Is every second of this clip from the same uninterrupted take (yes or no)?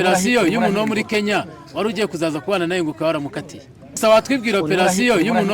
no